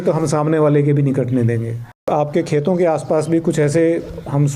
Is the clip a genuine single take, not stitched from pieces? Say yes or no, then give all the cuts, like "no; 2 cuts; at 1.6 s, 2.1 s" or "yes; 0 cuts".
no; 1 cut; at 2.1 s